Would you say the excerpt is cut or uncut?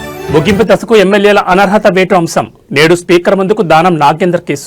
uncut